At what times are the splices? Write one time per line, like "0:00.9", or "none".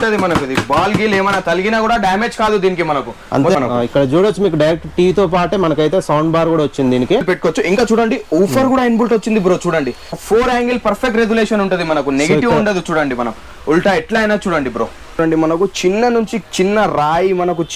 0:03.6
0:07.2
0:10.2
0:15.2